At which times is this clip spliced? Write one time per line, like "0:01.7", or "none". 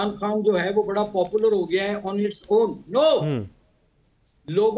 none